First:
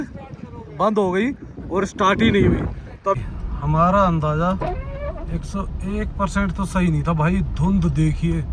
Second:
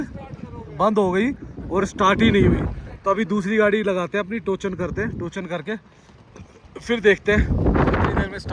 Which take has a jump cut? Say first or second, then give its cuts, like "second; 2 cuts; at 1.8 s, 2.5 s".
first; 1 cut; at 3.2 s